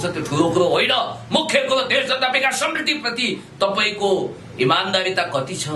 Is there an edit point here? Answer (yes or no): no